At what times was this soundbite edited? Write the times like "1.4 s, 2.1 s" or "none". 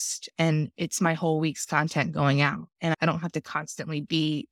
none